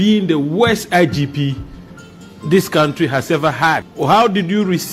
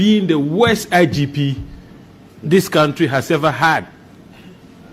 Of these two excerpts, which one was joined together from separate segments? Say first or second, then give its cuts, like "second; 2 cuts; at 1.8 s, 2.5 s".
first; 1 cut; at 3.9 s